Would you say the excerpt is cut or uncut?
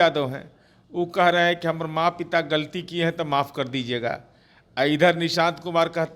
uncut